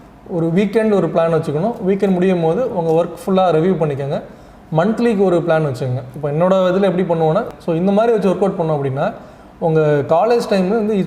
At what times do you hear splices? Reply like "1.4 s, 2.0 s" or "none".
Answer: 7.5 s